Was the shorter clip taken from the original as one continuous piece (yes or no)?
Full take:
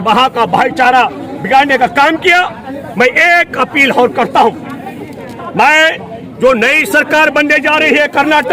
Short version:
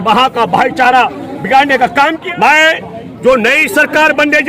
no